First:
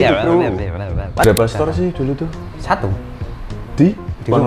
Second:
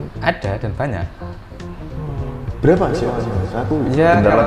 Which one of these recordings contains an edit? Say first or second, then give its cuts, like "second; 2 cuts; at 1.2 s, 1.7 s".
first; 1 cut; at 1.2 s